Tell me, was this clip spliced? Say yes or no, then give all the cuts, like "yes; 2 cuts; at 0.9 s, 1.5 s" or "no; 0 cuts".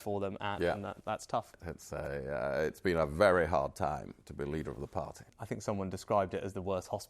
yes; 2 cuts; at 1.5 s, 5.3 s